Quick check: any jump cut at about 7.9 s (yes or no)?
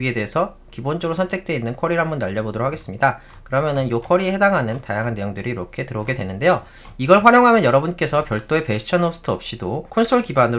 no